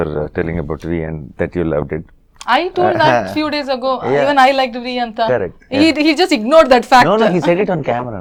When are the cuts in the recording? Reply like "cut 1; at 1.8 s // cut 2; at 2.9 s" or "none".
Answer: none